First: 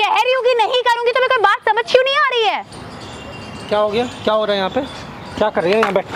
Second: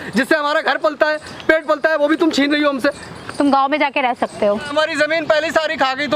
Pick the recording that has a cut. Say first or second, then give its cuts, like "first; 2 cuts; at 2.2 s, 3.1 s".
second; 1 cut; at 4.7 s